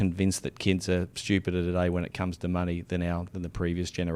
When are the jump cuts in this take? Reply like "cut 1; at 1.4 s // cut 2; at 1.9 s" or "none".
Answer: cut 1; at 1.1 s